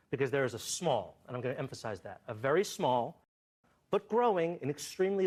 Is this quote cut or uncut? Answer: uncut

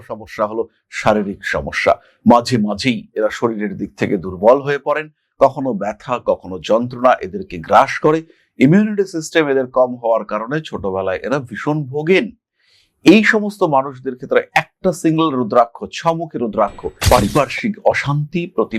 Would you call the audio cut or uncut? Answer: cut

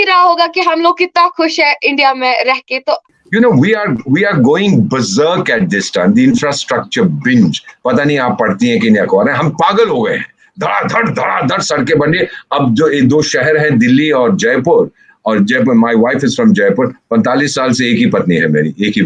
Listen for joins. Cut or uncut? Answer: cut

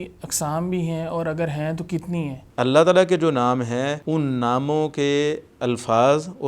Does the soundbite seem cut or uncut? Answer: cut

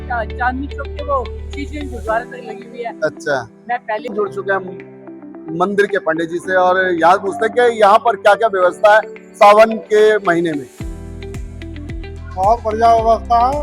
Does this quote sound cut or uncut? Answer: cut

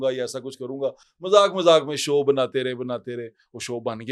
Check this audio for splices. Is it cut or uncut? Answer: uncut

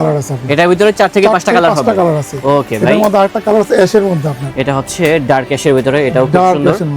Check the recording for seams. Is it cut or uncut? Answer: uncut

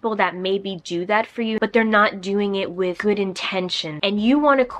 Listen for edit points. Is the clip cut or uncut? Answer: cut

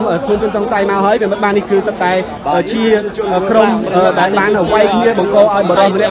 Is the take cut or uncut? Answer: uncut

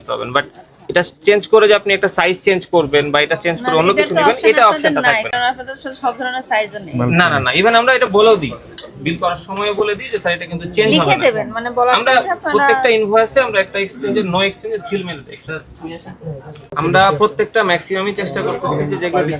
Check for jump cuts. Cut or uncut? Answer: uncut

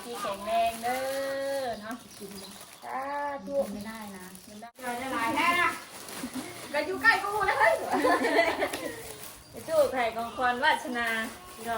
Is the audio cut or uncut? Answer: cut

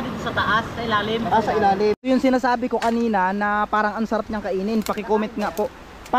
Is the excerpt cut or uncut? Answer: cut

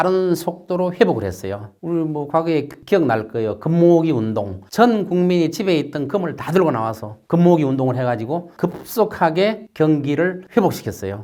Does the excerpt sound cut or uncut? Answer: uncut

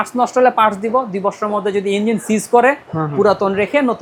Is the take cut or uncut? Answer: uncut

